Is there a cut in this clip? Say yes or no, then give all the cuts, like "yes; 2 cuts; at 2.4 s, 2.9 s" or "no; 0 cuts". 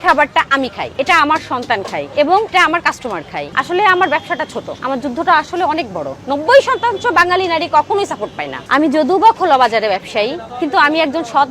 yes; 3 cuts; at 3.5 s, 6.1 s, 8.5 s